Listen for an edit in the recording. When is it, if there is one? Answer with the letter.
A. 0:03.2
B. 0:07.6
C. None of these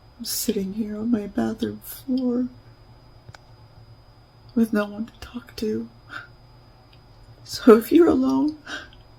A